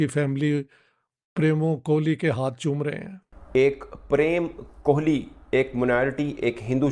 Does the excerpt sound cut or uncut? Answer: cut